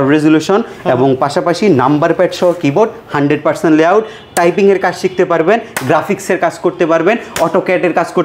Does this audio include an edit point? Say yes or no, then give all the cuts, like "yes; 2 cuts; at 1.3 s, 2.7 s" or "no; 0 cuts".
no; 0 cuts